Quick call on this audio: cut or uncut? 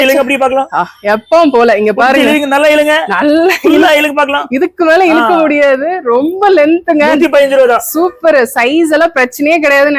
uncut